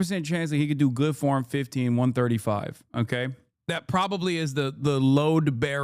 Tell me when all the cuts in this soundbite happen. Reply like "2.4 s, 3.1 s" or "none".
3.5 s